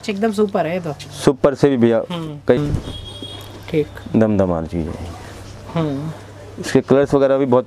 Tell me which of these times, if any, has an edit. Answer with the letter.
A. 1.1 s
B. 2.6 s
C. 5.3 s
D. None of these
B